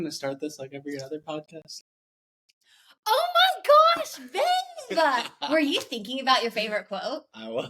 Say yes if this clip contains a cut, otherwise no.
no